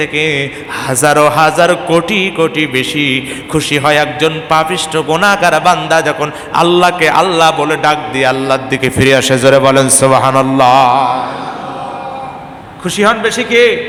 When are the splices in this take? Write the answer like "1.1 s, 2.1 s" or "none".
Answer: none